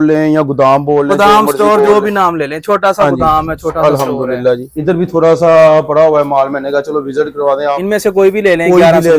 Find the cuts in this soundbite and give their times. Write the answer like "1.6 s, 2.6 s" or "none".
4.7 s, 7.8 s